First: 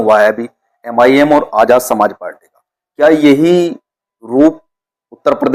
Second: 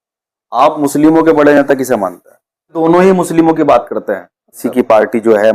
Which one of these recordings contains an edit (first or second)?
second